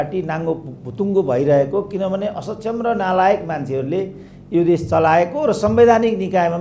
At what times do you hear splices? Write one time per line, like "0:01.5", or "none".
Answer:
none